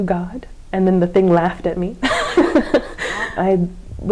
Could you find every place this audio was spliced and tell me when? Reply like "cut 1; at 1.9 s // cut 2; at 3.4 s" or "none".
cut 1; at 3.2 s